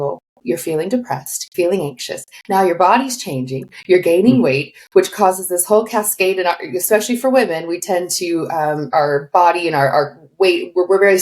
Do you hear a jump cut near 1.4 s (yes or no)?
yes